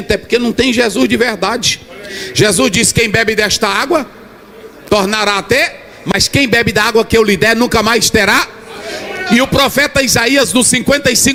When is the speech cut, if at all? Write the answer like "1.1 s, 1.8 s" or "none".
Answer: none